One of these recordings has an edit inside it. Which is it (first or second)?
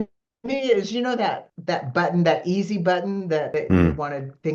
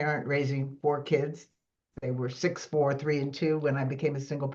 first